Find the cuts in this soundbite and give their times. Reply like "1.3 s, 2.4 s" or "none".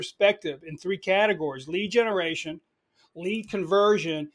none

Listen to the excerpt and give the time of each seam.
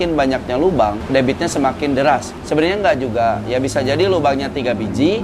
1.0 s, 2.3 s

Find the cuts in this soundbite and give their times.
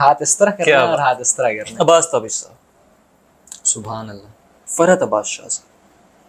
1.6 s, 4.5 s

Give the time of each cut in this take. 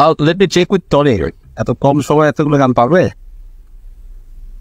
none

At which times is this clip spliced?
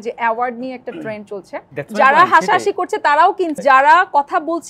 1.6 s, 3.5 s

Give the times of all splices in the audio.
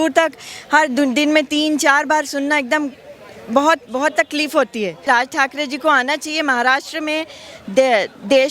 5.0 s

